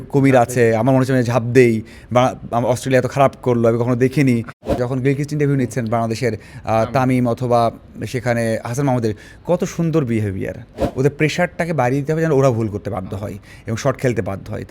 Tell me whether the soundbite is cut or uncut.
cut